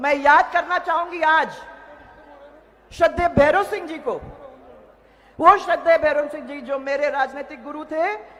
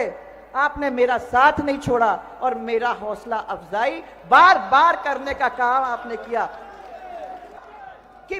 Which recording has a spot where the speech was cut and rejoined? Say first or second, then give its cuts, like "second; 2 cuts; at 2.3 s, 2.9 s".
second; 1 cut; at 7.5 s